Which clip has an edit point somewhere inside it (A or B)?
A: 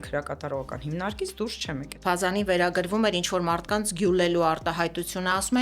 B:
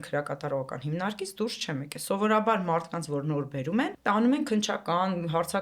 A